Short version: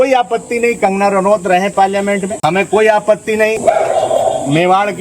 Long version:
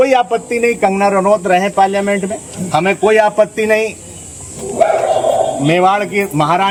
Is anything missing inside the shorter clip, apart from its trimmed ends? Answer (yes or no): yes